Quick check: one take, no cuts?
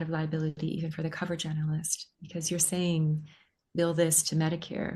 yes; 0 cuts

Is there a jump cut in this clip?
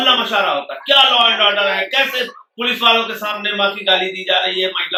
no; 0 cuts

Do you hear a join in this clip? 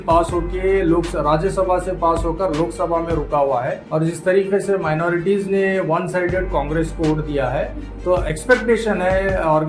yes; 1 cut; at 3.8 s

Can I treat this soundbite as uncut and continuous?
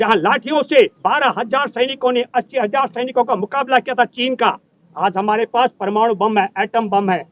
yes; 0 cuts

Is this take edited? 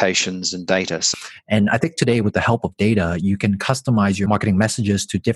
yes; 2 cuts; at 1.0 s, 4.3 s

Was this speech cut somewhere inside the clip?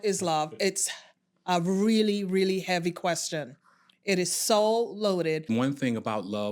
yes; 1 cut; at 5.4 s

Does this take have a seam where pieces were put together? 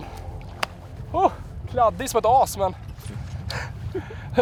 no; 0 cuts

